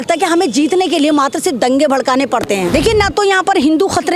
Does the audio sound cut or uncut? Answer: cut